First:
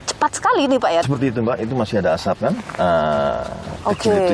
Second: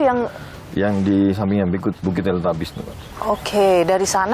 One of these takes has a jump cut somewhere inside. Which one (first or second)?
first